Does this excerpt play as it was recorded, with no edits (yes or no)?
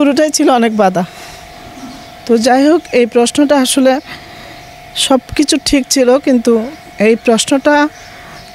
yes